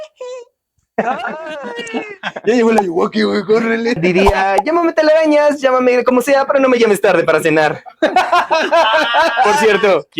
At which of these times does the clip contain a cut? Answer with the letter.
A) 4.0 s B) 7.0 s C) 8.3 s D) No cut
A